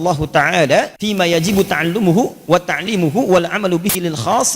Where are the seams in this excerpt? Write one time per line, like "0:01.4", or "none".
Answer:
0:01.0